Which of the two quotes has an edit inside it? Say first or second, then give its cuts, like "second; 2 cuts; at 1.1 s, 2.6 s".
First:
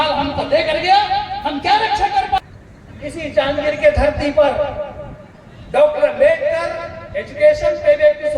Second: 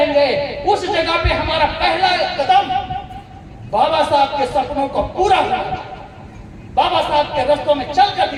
first; 1 cut; at 2.4 s